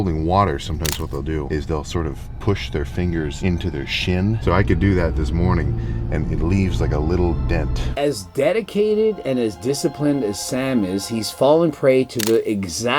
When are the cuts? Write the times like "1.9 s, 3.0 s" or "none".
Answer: 1.5 s, 3.3 s, 4.4 s, 7.8 s